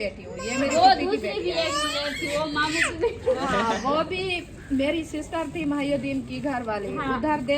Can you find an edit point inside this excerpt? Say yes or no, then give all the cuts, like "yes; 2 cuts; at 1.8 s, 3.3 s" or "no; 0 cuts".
no; 0 cuts